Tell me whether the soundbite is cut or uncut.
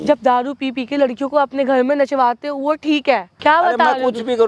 cut